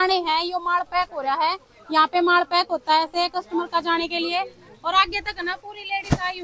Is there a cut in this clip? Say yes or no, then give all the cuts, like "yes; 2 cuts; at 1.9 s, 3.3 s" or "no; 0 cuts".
no; 0 cuts